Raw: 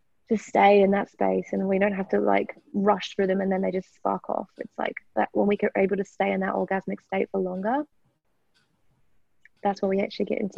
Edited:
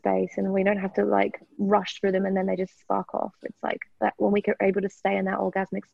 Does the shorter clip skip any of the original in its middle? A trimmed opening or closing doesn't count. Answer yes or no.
no